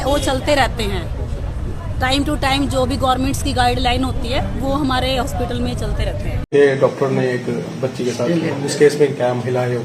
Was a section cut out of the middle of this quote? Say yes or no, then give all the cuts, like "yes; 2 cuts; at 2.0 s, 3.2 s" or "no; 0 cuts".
yes; 1 cut; at 6.3 s